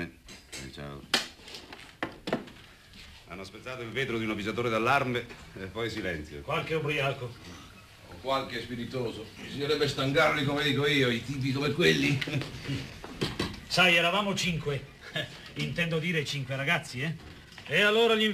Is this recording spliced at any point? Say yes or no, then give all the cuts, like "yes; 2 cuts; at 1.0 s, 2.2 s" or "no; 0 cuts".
no; 0 cuts